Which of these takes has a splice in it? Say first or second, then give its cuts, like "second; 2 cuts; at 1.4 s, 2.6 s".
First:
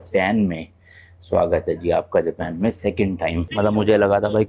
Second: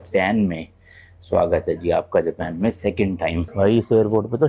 first; 1 cut; at 3.5 s